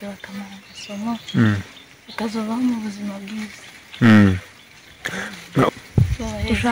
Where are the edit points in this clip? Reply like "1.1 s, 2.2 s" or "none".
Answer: 5.7 s